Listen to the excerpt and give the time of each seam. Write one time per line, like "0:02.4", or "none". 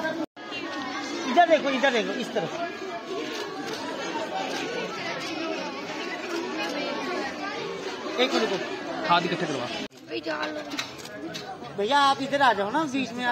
0:09.9